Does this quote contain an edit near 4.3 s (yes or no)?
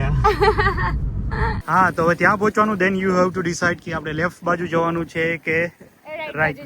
no